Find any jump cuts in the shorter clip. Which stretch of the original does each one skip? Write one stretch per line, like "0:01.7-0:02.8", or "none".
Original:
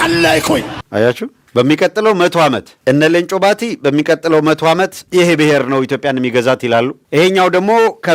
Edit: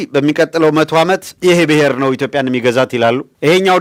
none